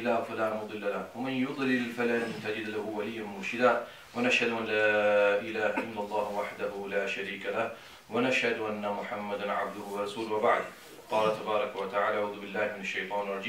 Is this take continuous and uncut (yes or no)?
no